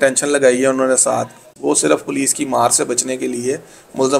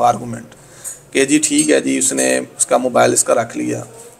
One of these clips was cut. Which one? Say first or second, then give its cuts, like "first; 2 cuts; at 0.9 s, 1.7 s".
first; 1 cut; at 1.4 s